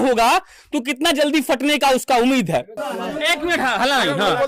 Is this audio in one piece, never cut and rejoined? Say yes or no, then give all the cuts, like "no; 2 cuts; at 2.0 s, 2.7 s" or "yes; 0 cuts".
no; 1 cut; at 2.7 s